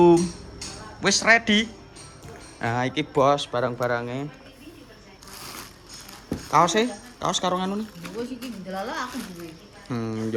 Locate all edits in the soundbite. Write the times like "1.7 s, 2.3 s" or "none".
none